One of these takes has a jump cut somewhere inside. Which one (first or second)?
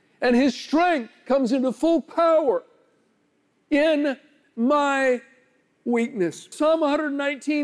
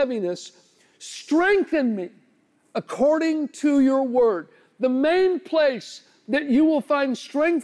first